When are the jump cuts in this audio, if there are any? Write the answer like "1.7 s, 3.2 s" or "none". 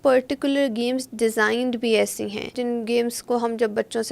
2.6 s